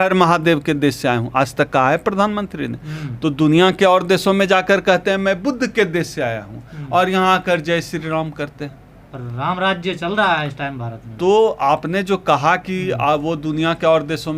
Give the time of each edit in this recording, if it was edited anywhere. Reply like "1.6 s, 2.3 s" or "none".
none